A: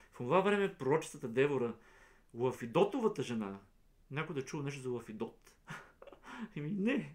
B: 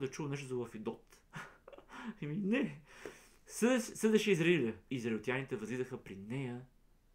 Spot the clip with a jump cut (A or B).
B